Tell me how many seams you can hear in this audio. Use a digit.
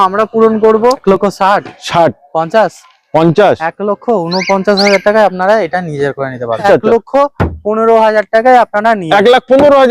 2